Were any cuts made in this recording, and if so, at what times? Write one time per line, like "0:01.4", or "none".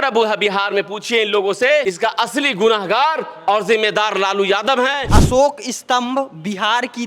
0:01.8
0:05.1